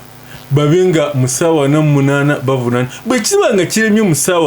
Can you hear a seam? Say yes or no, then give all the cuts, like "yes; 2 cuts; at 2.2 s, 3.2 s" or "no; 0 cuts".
no; 0 cuts